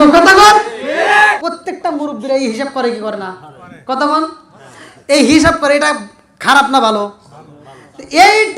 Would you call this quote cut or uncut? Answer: cut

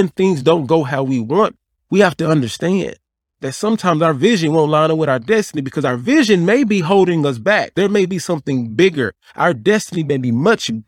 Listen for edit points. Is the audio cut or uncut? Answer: cut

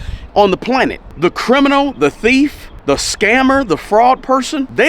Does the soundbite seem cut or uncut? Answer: cut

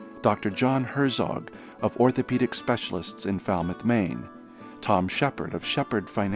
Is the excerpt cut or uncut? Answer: uncut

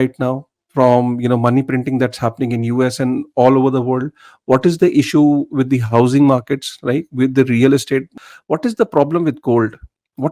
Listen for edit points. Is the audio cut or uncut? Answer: cut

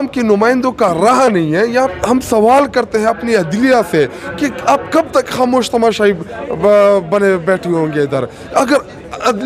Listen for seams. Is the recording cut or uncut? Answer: cut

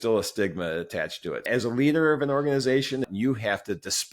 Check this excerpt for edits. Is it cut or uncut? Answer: cut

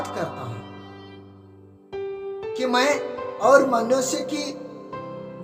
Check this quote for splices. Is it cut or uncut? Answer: uncut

